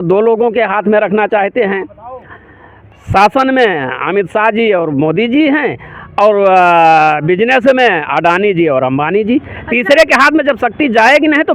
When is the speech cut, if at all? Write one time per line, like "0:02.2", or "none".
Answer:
none

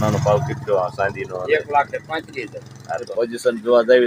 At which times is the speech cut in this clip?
0:03.1

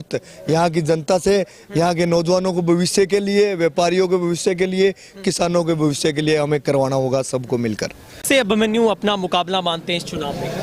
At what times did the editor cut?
0:08.2

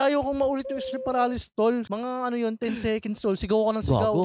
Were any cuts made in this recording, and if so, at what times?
0:01.8

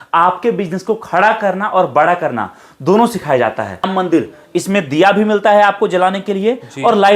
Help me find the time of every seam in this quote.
0:03.9

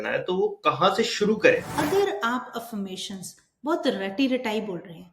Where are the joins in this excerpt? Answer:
0:01.7

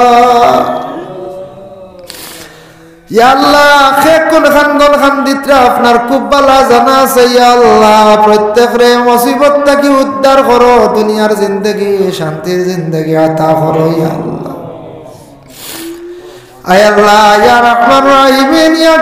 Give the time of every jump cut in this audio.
none

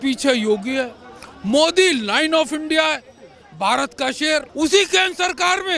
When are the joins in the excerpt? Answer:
0:04.5

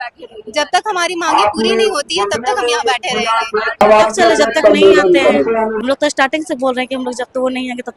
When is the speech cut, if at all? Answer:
0:03.8

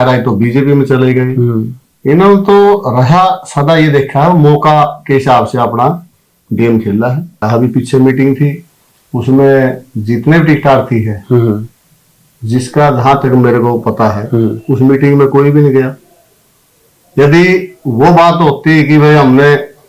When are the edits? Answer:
0:07.4

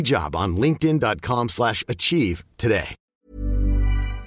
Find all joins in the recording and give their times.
0:03.1

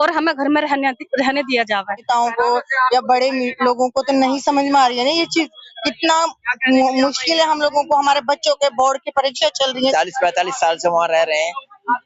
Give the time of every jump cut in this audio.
0:02.0
0:09.8

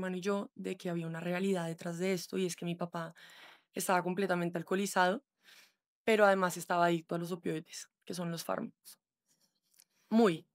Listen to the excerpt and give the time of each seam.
none

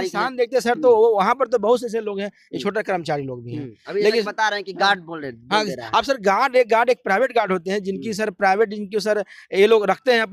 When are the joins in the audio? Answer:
none

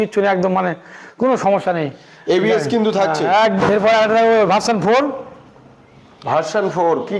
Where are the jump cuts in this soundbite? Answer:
0:03.6

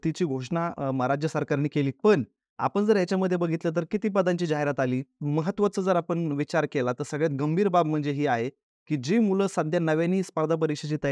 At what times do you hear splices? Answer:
0:05.2

